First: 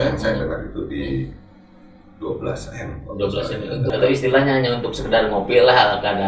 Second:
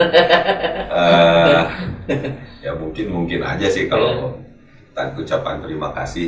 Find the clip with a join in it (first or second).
first